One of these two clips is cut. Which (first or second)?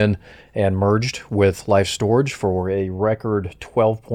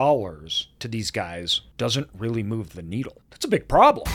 second